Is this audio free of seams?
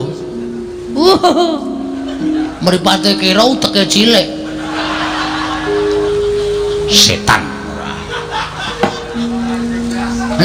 yes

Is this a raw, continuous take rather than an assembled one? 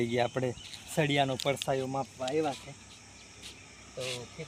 yes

